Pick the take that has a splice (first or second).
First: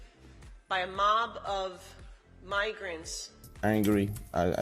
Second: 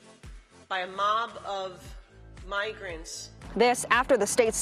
first